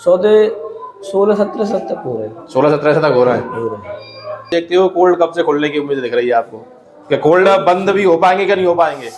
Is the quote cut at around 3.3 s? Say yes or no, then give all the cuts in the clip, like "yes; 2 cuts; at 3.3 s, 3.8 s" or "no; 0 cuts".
no; 1 cut; at 4.5 s